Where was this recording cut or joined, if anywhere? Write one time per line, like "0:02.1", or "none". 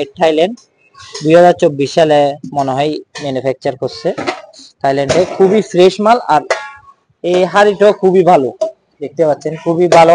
none